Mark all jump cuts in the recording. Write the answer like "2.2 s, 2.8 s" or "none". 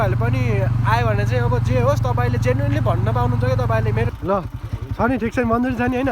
4.1 s